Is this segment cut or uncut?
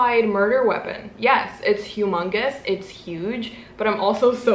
uncut